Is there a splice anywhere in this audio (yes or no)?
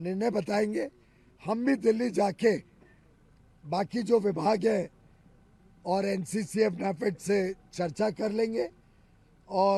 no